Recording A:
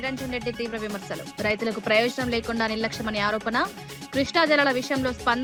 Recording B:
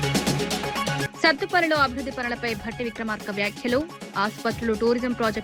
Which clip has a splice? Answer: B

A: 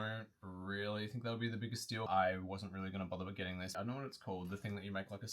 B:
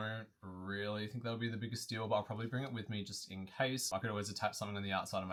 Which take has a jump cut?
A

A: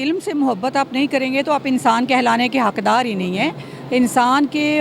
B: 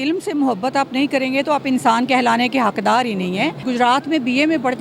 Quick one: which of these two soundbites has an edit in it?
B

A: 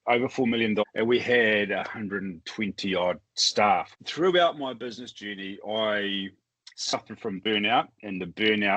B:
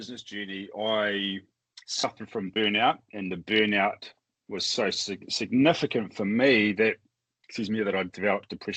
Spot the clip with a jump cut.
A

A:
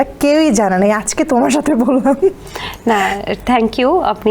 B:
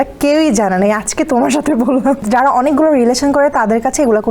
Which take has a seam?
B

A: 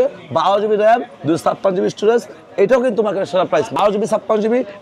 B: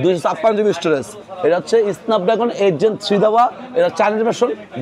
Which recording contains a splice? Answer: A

